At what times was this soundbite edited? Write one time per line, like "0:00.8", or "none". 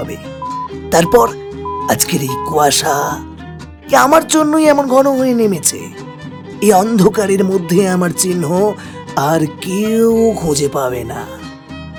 none